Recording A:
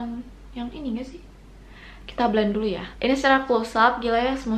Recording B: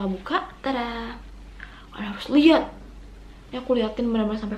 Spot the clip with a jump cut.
A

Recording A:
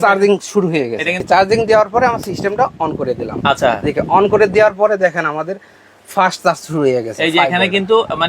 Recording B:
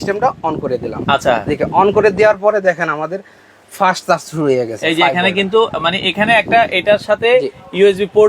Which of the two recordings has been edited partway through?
A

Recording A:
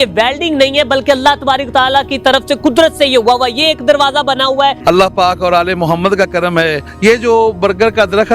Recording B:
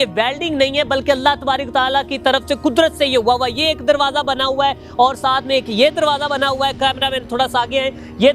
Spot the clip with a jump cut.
A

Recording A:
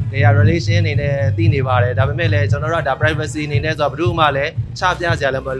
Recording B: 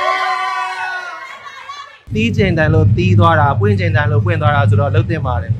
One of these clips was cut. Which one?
B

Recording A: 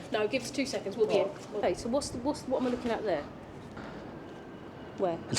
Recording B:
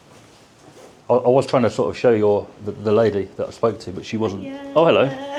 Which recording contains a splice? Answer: A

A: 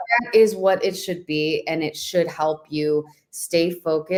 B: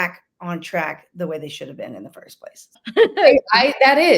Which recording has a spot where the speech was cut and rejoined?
B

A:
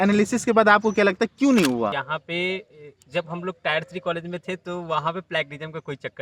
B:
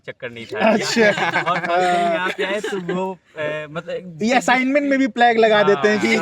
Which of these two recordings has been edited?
A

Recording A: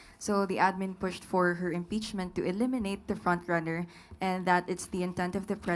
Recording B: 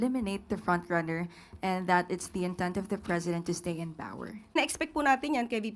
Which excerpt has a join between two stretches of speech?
B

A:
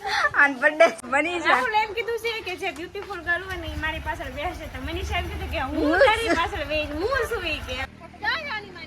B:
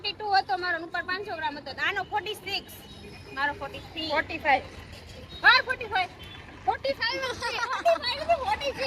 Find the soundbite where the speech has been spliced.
A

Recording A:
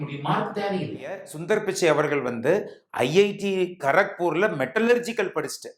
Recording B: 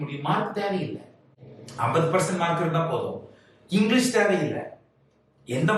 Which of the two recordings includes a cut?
A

